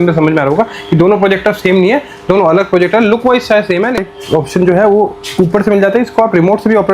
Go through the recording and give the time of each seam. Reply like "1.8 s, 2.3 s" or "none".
4.0 s